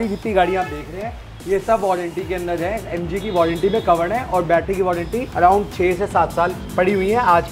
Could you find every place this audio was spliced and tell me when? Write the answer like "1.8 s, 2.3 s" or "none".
none